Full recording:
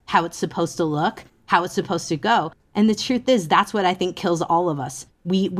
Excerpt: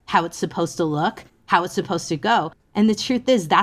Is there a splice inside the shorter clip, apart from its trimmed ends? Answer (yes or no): no